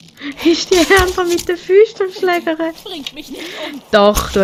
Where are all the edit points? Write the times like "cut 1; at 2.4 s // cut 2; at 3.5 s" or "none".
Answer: none